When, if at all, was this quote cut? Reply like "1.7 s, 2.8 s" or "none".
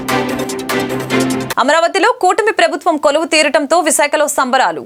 none